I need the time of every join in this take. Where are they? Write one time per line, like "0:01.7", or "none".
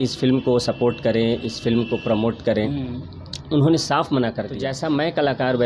0:04.6